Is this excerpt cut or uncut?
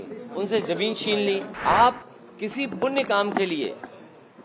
cut